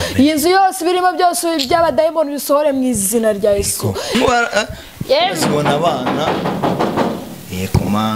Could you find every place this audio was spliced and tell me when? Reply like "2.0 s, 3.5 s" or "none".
4.1 s